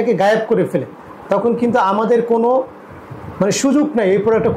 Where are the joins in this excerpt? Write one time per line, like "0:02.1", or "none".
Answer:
none